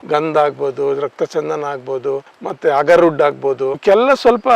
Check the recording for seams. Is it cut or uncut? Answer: cut